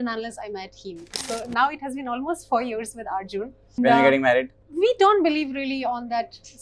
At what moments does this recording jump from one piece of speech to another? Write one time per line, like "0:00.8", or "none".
0:01.1
0:03.8
0:04.6